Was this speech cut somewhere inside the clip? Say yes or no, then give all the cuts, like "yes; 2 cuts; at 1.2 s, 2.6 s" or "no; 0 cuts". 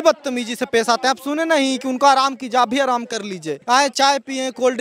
yes; 1 cut; at 3.5 s